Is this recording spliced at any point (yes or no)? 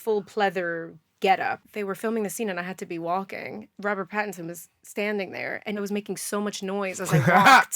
yes